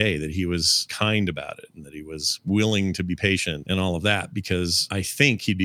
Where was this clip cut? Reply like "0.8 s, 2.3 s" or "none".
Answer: 0.9 s, 3.6 s, 4.8 s